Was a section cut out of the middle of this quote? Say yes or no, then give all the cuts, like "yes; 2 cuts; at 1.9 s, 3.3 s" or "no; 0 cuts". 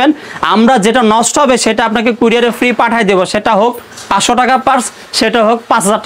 no; 0 cuts